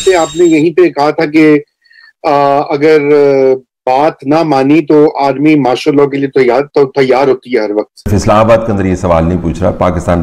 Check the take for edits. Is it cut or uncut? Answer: cut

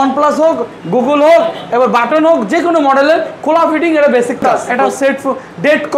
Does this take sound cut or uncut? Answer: cut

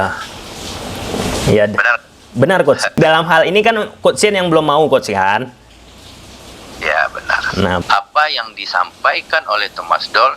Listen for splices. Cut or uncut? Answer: cut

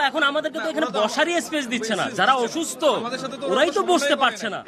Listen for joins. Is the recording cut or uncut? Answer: uncut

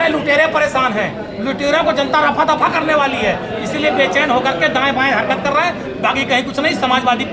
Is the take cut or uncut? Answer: uncut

